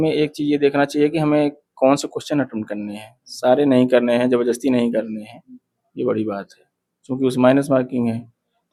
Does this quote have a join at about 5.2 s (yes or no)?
no